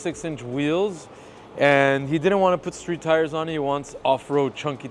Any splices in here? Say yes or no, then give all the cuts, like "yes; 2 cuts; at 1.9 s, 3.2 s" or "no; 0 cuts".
no; 0 cuts